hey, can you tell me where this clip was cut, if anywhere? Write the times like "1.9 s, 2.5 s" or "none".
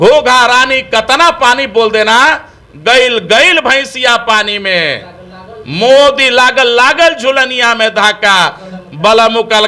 none